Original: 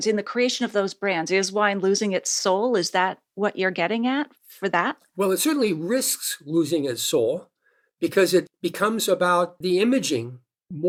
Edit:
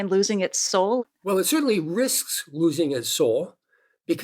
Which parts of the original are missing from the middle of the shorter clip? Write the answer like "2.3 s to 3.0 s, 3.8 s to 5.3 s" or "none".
2.7 s to 4.9 s